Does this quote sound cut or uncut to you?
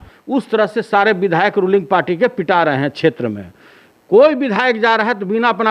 uncut